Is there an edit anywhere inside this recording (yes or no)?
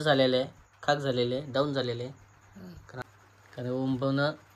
yes